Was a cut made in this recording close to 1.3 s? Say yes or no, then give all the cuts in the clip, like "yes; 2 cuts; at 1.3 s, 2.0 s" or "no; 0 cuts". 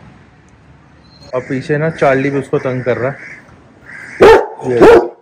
yes; 1 cut; at 1.3 s